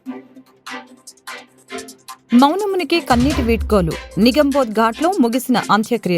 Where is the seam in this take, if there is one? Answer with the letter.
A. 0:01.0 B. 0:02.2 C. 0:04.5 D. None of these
B